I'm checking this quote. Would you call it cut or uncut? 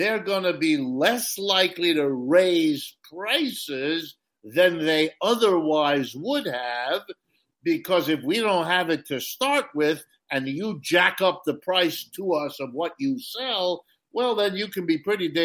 uncut